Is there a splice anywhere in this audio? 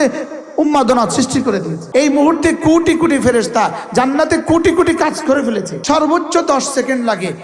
yes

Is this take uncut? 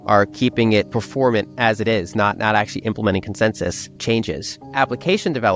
no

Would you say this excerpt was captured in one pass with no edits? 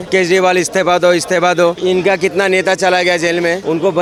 yes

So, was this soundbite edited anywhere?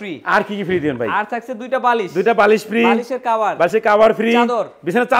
no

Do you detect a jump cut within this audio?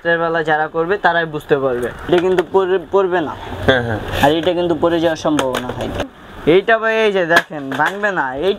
yes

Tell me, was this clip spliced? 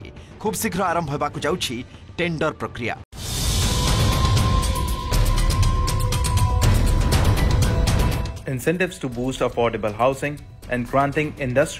yes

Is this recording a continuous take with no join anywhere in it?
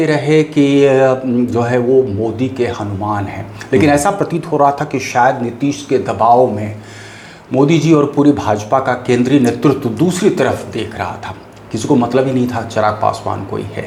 yes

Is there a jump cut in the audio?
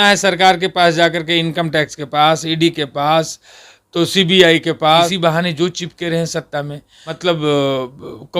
yes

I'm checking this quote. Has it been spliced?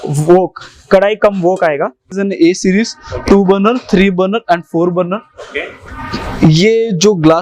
yes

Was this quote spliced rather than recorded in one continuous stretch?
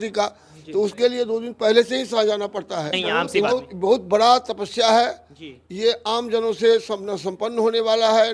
yes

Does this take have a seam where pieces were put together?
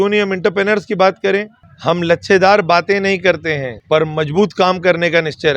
yes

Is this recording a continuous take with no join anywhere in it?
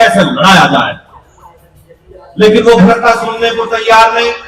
no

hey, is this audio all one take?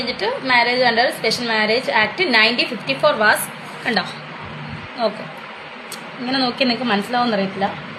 yes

